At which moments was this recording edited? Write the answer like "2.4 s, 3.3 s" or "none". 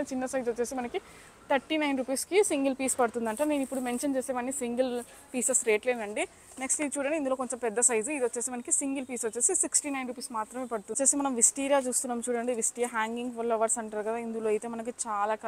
10.9 s